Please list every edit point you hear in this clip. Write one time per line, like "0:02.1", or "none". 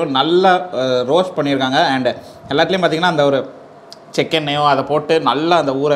none